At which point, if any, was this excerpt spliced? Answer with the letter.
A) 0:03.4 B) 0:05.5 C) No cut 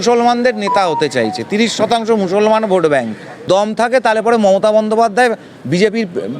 A